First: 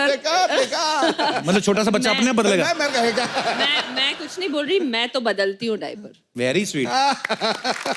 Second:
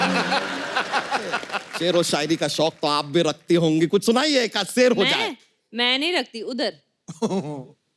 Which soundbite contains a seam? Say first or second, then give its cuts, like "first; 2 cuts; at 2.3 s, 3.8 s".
second; 1 cut; at 1.6 s